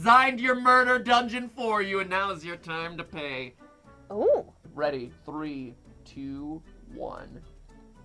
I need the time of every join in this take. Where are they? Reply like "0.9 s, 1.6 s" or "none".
4.7 s

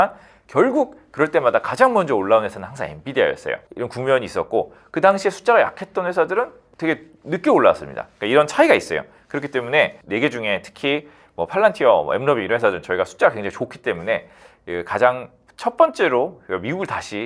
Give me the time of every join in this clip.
10.0 s

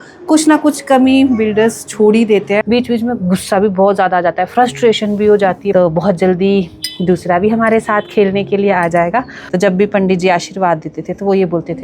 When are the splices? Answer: 2.6 s, 5.7 s, 9.4 s

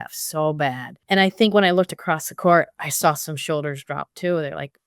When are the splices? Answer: 0.9 s

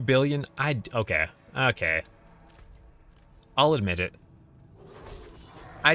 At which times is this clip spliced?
none

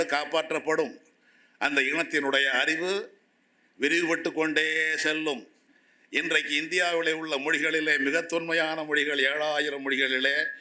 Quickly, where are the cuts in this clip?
none

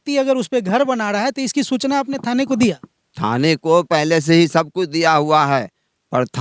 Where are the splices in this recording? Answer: none

